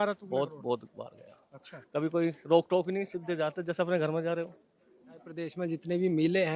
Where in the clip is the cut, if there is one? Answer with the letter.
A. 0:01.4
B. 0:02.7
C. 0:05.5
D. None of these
C